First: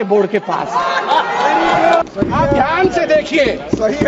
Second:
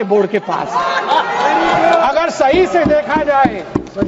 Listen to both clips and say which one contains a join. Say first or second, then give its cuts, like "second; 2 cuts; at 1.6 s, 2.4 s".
first; 1 cut; at 2.0 s